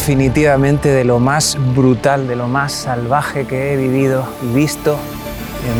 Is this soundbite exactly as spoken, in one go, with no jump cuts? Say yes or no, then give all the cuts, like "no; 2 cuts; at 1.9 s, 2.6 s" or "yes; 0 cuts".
yes; 0 cuts